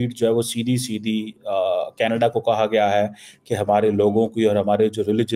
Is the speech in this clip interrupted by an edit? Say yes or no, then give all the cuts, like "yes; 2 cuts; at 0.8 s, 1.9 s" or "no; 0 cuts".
no; 0 cuts